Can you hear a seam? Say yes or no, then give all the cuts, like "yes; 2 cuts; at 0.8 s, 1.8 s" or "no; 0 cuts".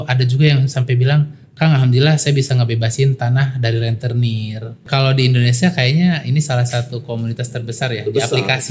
yes; 1 cut; at 4.8 s